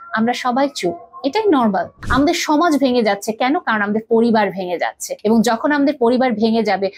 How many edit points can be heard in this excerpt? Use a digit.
2